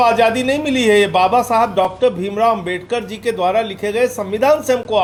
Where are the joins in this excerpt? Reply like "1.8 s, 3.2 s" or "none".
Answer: none

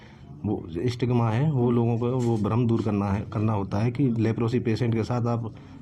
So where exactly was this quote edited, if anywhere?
none

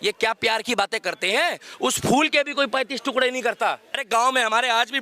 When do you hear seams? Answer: 4.0 s

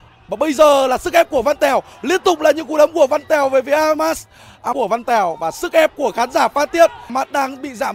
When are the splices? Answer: 4.7 s, 7.1 s

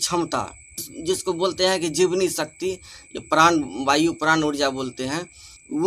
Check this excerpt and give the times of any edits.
none

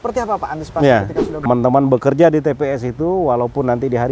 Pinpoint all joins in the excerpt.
1.5 s

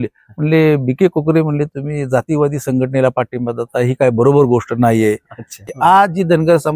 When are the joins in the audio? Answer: 5.6 s

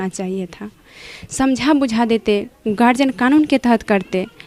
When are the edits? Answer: none

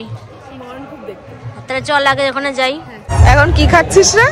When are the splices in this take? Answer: 3.1 s

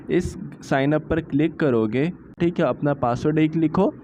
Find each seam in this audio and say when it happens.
2.4 s

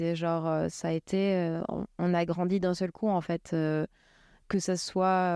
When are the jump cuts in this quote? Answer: none

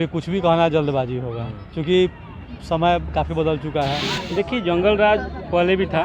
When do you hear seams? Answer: 4.0 s

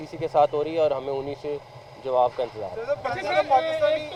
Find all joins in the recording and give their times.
none

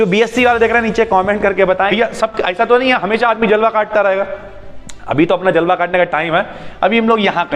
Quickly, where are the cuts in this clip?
1.9 s

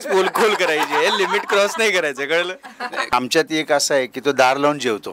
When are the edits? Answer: 3.1 s

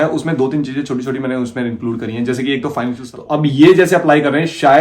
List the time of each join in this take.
3.1 s

